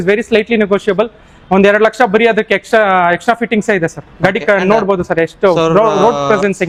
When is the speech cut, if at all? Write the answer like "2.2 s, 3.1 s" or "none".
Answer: none